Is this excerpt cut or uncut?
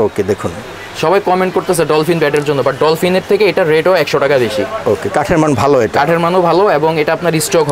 uncut